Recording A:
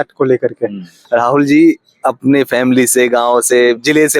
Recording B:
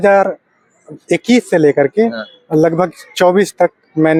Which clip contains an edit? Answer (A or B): A